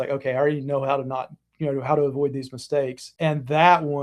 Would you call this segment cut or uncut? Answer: cut